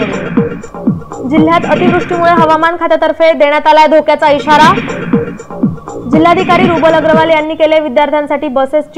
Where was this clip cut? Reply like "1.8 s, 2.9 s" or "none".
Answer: 1.1 s